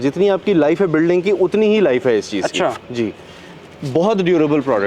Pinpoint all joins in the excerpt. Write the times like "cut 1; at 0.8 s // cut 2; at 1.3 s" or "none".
none